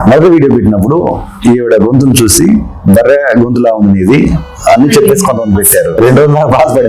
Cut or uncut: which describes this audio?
cut